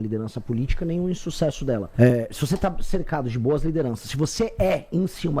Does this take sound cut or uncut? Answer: cut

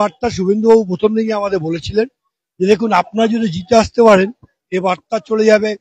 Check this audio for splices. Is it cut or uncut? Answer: uncut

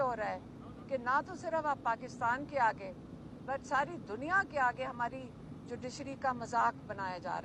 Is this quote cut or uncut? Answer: uncut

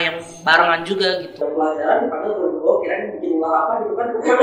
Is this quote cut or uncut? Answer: cut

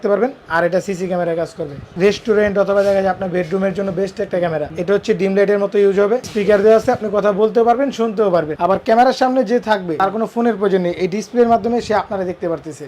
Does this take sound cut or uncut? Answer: cut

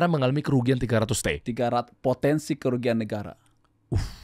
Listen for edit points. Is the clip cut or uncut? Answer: uncut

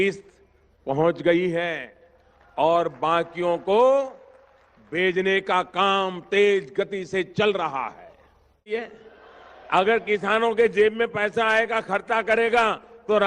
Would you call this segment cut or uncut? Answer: cut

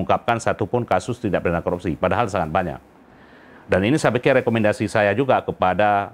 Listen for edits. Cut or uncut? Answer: uncut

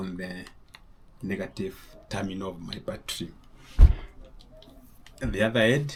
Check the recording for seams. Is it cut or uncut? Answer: uncut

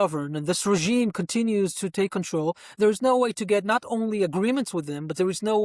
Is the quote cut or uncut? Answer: uncut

